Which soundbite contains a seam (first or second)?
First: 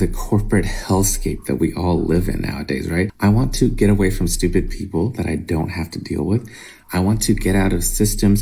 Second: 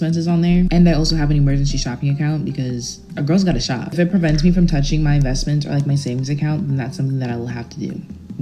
first